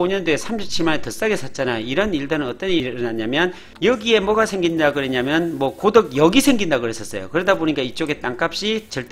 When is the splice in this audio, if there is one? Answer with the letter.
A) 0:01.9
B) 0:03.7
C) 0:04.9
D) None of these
B